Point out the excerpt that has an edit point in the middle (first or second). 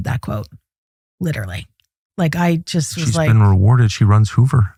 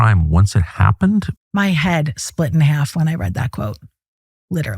second